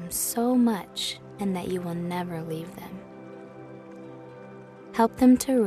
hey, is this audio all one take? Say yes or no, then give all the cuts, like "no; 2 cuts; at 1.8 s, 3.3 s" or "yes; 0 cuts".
yes; 0 cuts